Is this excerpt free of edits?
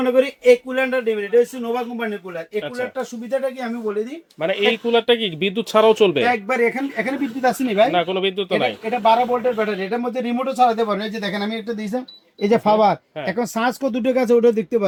yes; 0 cuts

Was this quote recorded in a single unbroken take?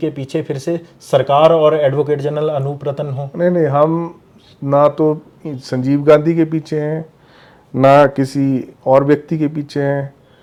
yes; 0 cuts

